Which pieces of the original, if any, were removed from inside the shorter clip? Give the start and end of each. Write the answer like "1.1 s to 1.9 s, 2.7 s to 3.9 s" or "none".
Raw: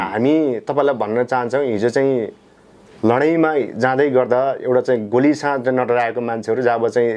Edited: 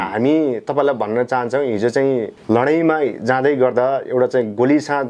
2.3 s to 2.9 s